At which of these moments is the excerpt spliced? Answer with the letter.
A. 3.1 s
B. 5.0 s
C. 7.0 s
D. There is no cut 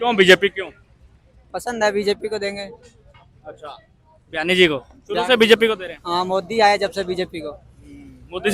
D